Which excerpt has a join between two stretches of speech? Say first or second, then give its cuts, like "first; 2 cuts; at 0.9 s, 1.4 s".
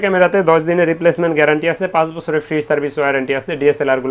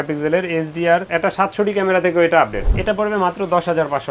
second; 2 cuts; at 1.1 s, 2.7 s